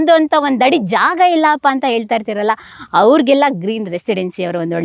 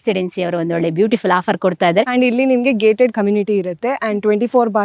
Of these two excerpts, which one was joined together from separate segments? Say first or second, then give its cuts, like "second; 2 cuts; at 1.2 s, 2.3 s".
second; 1 cut; at 2.1 s